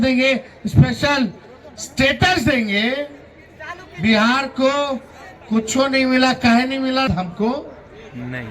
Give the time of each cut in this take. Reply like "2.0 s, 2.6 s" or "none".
7.1 s

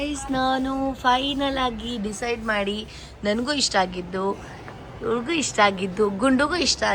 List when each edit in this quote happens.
none

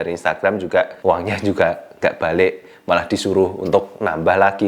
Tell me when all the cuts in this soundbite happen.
0.9 s

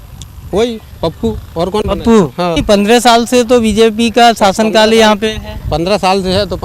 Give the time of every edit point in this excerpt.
2.6 s

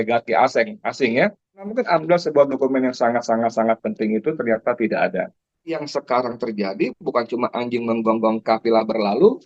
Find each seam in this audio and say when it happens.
1.6 s, 5.9 s

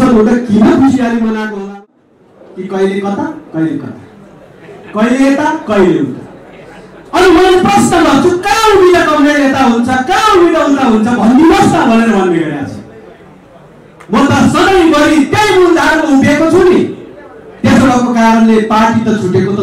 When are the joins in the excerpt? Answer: 1.9 s

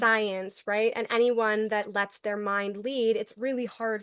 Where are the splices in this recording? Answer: none

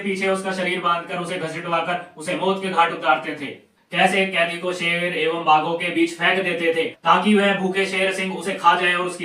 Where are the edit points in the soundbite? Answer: none

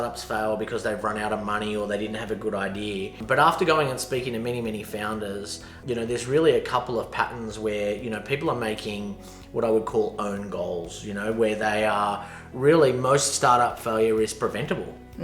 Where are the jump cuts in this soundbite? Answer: 3.2 s, 5.8 s

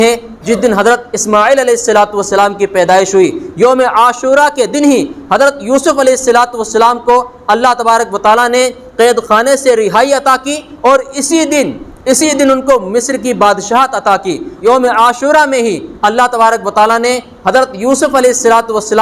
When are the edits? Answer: 14.5 s

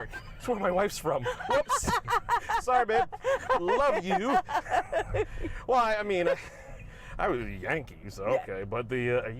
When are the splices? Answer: none

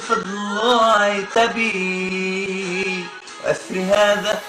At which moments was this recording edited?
none

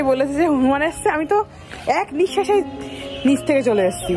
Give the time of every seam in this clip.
none

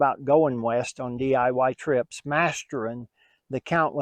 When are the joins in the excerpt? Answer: none

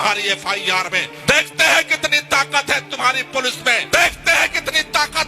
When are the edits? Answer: 1.1 s, 3.8 s

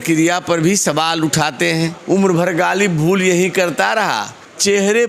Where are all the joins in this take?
2.0 s

